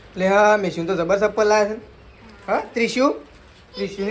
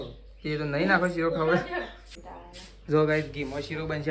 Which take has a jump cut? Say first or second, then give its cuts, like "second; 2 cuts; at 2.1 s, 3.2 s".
second; 1 cut; at 2.2 s